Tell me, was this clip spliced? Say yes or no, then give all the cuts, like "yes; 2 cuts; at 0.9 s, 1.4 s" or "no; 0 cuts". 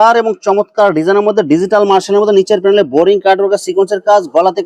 no; 0 cuts